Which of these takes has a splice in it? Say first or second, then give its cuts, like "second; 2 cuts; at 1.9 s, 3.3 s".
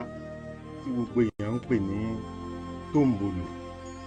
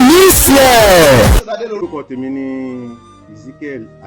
second; 1 cut; at 1.8 s